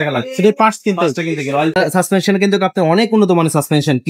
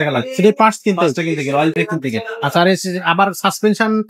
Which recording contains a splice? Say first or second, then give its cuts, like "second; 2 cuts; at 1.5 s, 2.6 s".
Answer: first; 1 cut; at 1.8 s